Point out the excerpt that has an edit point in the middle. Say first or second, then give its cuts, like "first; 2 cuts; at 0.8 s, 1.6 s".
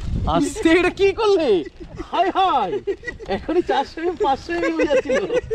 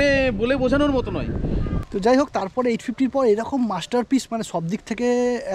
second; 1 cut; at 1.7 s